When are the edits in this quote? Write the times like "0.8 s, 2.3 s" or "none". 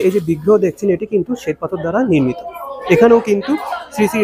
2.8 s